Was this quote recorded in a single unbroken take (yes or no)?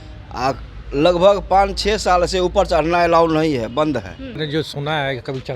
no